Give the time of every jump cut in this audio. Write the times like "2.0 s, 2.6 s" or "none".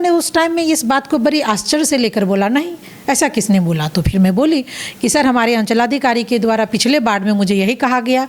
none